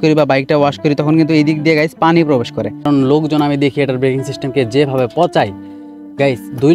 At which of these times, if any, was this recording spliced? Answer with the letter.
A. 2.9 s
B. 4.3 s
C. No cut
A